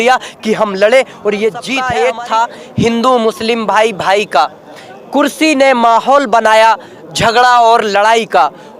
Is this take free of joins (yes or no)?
no